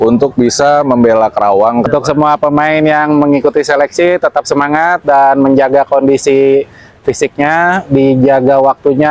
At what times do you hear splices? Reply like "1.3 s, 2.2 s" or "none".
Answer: 1.9 s

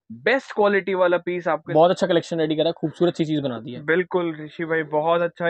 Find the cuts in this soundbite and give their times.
1.6 s

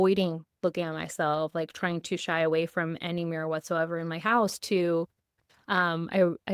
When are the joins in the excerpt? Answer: none

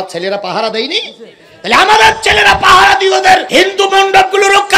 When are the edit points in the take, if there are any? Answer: 3.5 s

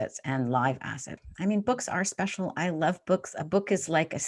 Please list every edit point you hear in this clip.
1.2 s

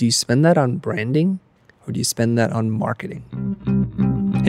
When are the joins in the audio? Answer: 3.1 s

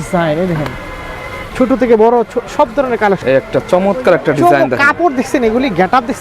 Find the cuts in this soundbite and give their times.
3.2 s

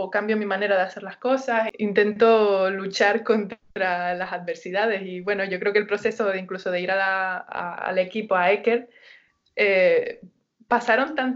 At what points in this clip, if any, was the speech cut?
1.7 s

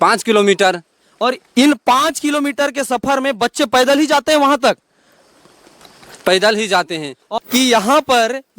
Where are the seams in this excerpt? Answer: 7.2 s

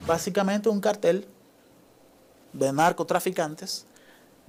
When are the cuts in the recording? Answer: none

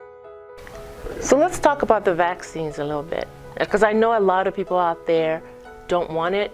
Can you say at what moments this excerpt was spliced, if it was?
1.0 s

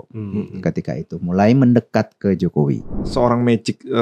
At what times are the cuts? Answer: 3.1 s

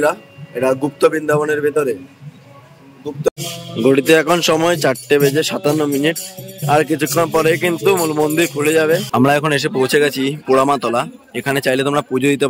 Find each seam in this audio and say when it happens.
3.3 s, 9.1 s

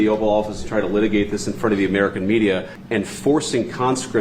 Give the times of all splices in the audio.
2.8 s

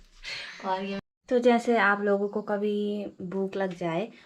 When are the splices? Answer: 1.0 s

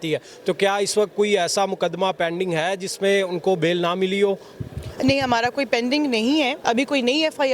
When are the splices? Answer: 6.6 s

